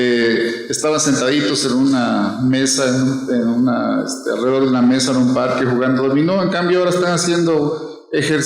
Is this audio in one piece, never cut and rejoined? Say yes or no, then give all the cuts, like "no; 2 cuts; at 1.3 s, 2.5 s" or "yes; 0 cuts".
no; 1 cut; at 1.1 s